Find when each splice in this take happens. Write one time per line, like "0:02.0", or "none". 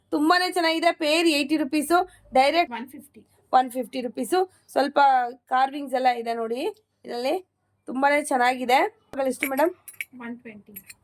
0:02.7
0:09.2